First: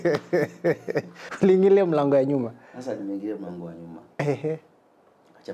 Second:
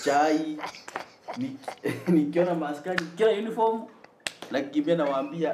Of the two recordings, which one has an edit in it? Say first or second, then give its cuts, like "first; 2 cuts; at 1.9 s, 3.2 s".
first; 1 cut; at 1.2 s